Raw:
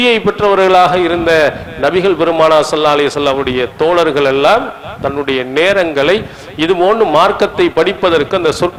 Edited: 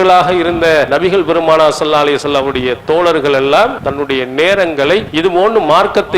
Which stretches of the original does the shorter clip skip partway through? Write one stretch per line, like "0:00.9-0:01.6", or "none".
0:01.5-0:01.8
0:04.7-0:05.0
0:06.3-0:06.5